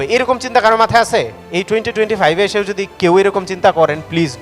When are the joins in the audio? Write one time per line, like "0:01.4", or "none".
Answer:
0:01.4